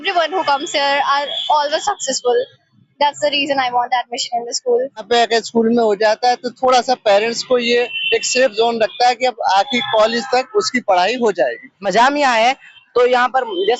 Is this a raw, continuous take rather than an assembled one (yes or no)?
no